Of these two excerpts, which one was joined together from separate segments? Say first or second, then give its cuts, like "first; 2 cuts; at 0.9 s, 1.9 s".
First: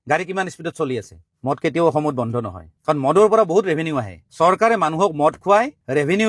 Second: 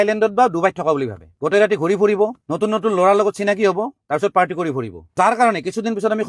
first; 1 cut; at 1.2 s